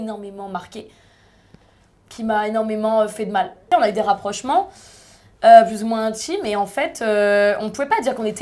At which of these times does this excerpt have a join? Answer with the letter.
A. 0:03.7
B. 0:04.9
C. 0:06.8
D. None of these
A